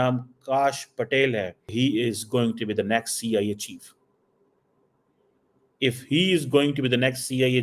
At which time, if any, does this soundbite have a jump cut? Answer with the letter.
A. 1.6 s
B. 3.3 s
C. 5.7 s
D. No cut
A